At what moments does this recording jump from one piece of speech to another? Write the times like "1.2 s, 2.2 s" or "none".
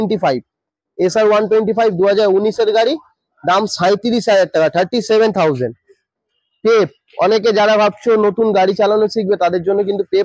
none